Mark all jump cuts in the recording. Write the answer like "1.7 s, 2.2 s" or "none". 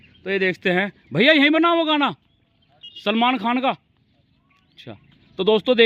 none